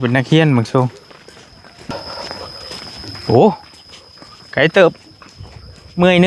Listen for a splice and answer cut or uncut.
cut